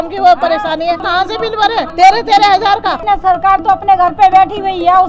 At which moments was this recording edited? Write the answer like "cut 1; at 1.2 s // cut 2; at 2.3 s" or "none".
cut 1; at 1.0 s // cut 2; at 3.0 s